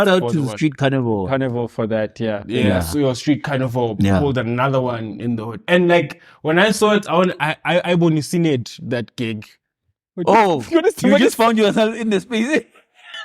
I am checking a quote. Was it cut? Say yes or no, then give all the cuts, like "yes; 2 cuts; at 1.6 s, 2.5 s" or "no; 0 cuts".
no; 0 cuts